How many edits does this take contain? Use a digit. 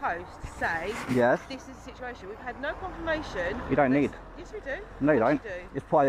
0